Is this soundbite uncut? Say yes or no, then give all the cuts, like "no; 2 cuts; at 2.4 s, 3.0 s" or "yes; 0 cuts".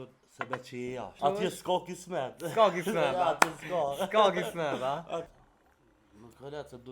no; 2 cuts; at 1.2 s, 5.4 s